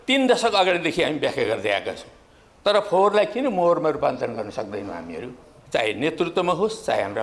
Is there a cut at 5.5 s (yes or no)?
yes